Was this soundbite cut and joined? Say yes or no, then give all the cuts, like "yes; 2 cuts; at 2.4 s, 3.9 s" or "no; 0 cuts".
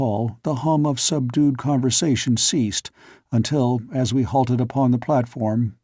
yes; 1 cut; at 4.7 s